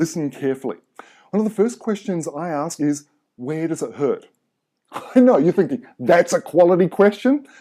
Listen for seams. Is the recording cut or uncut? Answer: cut